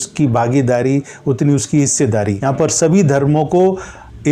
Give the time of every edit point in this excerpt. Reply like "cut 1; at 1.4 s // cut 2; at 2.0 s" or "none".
cut 1; at 2.4 s